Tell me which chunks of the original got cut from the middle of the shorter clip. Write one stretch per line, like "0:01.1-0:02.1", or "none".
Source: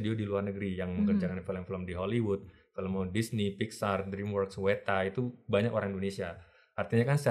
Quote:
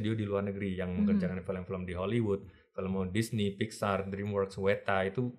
none